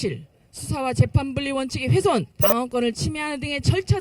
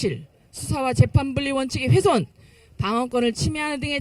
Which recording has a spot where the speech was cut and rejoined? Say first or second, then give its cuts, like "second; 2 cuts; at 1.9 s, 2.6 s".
first; 1 cut; at 2.4 s